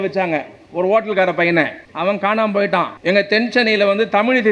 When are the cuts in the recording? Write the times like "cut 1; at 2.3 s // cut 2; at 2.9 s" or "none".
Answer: cut 1; at 1.8 s // cut 2; at 2.9 s